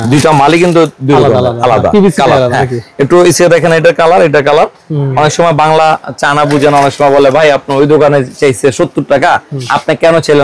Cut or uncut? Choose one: uncut